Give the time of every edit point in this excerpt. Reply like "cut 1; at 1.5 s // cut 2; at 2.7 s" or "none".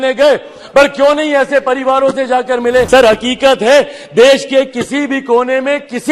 cut 1; at 2.9 s